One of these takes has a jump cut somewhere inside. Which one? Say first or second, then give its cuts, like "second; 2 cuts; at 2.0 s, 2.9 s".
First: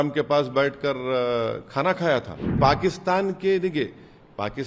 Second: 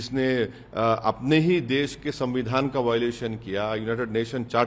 first; 1 cut; at 2.6 s